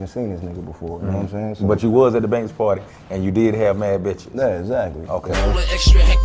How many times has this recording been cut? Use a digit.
1